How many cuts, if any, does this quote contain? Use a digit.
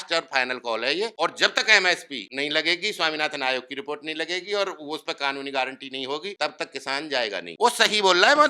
4